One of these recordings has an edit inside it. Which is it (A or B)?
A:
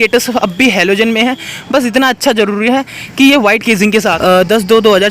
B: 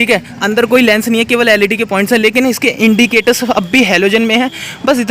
A